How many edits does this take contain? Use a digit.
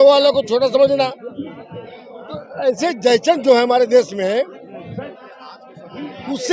0